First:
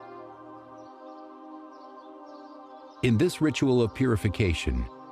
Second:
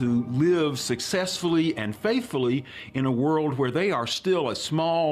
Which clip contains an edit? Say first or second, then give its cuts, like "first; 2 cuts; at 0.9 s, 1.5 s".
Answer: first; 1 cut; at 1.7 s